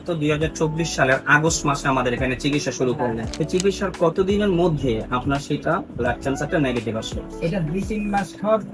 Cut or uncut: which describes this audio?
cut